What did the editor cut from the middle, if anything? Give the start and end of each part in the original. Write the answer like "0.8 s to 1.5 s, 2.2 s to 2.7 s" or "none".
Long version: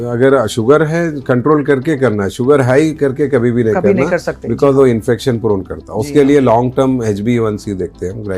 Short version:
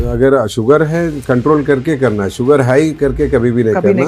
none